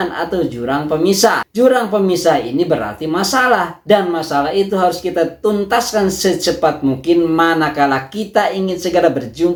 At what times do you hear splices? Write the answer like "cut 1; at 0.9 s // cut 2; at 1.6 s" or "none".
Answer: none